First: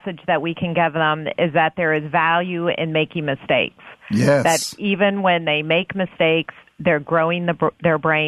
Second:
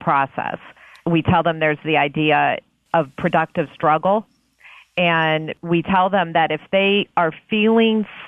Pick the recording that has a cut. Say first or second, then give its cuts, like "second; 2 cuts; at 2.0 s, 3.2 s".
second; 2 cuts; at 1.0 s, 5.5 s